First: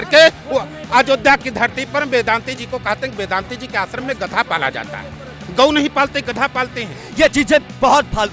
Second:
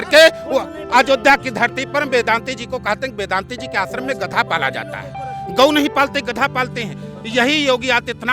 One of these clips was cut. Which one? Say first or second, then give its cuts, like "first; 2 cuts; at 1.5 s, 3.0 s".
first; 1 cut; at 7.0 s